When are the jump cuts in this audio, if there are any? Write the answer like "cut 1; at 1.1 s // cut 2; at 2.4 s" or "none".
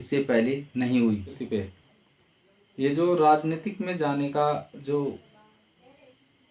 cut 1; at 1.3 s